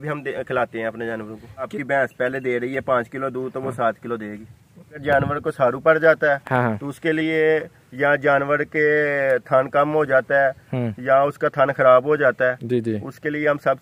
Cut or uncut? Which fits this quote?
cut